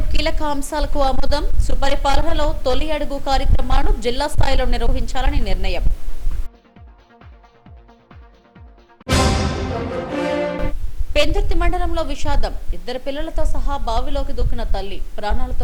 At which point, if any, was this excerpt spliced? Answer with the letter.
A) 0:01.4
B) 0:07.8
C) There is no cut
C